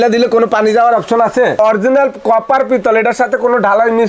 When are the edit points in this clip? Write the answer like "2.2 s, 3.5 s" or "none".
1.6 s